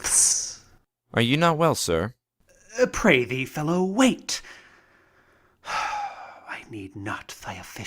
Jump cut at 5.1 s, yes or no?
no